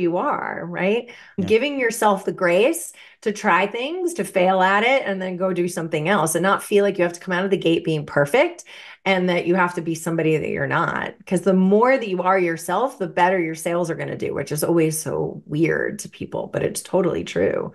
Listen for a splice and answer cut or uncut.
cut